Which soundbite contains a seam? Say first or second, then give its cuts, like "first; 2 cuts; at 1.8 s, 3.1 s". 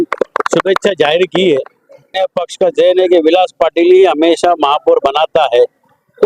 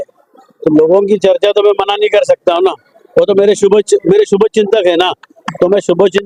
first; 1 cut; at 2.2 s